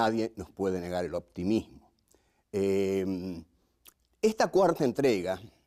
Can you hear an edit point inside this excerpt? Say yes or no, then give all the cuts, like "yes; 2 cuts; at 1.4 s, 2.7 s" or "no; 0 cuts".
no; 0 cuts